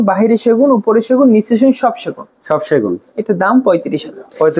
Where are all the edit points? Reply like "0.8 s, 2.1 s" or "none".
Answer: none